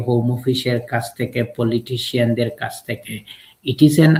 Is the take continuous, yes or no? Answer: yes